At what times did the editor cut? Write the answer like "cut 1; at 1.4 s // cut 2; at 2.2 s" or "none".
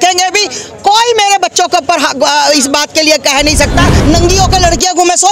cut 1; at 4.0 s